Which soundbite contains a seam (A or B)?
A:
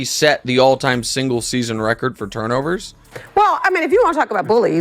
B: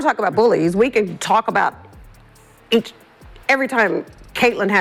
A